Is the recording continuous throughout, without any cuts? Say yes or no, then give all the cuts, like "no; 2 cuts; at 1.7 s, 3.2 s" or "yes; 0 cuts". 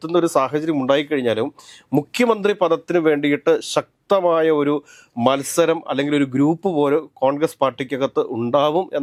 yes; 0 cuts